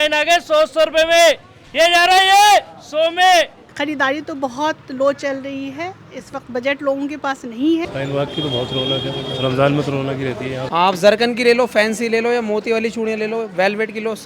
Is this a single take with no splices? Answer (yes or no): no